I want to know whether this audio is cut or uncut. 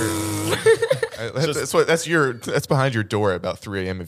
cut